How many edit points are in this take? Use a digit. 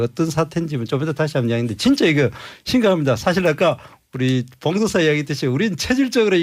1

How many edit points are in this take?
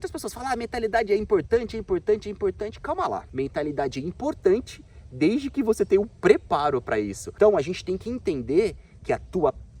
2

